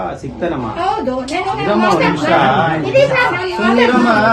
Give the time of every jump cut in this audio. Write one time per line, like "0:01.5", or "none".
none

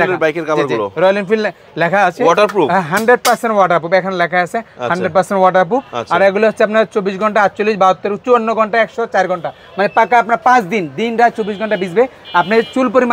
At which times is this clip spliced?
none

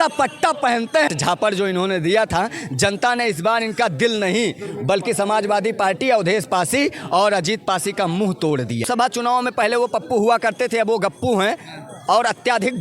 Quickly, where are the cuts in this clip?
0:01.1
0:08.8

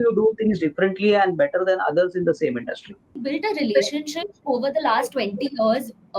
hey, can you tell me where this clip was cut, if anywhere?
0:03.1

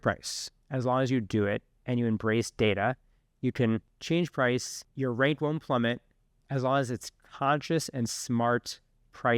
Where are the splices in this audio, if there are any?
0:03.9
0:04.8

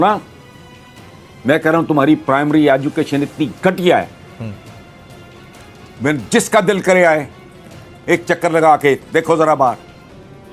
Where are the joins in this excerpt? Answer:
none

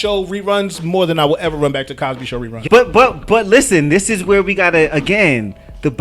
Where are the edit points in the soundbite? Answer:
0:02.6

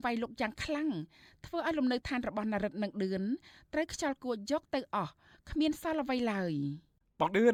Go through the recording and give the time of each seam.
none

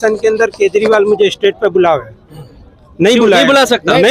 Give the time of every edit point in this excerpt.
none

